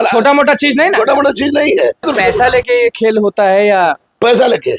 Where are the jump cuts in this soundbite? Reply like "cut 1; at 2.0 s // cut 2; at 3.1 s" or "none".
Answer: cut 1; at 2.1 s